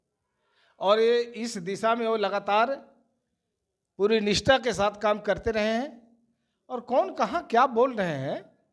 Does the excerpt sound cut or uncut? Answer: uncut